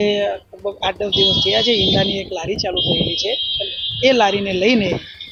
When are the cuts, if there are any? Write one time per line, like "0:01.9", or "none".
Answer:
none